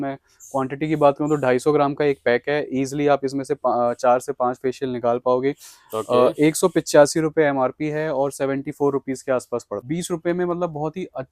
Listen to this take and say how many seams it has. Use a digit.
1